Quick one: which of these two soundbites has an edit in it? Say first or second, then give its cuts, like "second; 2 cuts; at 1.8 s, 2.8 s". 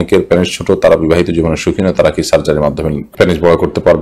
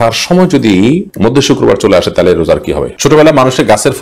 second; 2 cuts; at 1.1 s, 2.9 s